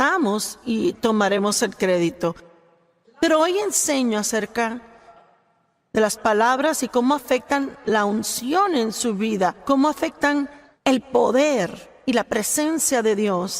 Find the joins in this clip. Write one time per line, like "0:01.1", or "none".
0:10.6